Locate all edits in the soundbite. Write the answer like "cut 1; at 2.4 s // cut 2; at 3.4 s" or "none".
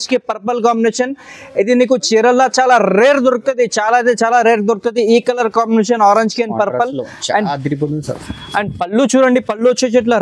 none